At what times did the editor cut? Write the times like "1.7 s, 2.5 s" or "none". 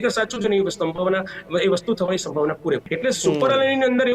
2.9 s